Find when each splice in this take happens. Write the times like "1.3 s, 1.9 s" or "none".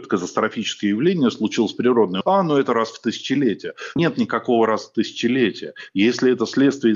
2.1 s, 4.0 s